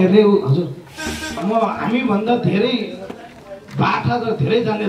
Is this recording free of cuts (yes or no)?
no